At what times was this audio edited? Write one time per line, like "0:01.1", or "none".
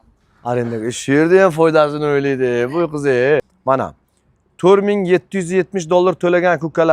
0:03.5